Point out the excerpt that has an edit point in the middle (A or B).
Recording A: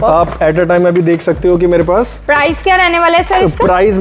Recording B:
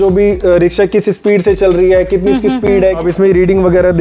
B